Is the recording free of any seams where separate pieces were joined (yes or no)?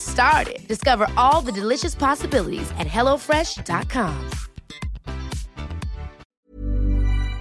no